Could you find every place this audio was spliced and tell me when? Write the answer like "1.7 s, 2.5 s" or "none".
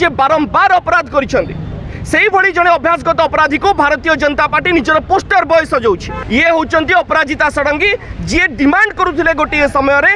6.1 s